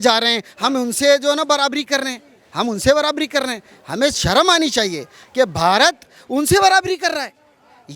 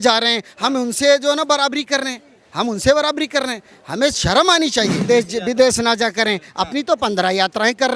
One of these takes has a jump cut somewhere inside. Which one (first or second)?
second